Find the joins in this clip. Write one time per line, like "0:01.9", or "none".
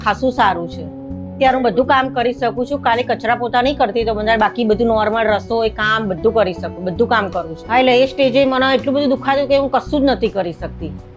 0:07.6